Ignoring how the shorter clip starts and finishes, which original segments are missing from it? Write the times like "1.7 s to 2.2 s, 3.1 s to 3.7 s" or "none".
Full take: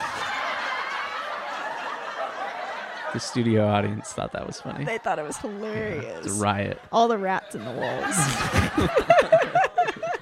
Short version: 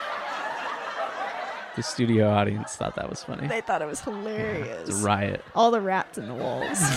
3.0 s to 3.1 s